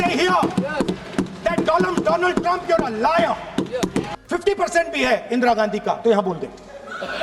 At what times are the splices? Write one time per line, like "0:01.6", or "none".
0:04.1